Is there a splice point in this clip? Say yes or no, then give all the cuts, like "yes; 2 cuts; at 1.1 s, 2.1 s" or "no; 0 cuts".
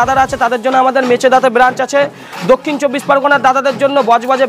no; 0 cuts